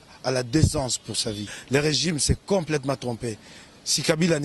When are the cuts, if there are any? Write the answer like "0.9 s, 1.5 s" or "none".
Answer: 1.5 s